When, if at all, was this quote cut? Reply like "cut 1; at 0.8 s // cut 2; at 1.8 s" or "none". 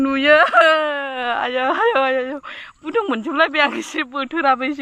none